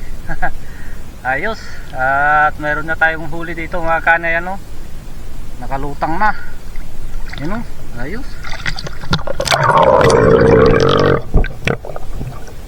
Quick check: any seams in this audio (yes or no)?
no